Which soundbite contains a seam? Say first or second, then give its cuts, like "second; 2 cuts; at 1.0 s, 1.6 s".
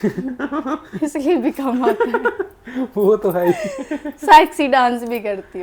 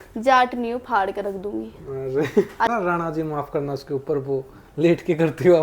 second; 1 cut; at 2.7 s